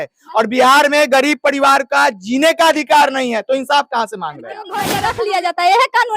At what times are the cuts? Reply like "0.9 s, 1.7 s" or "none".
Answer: 4.7 s